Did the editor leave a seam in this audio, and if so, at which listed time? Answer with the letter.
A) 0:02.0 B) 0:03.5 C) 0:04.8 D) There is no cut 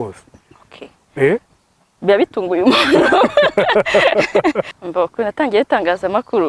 C